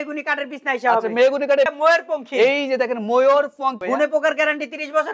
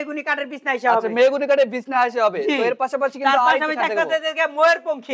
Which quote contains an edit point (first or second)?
first